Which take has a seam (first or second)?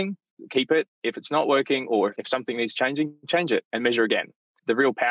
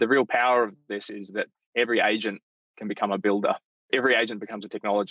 second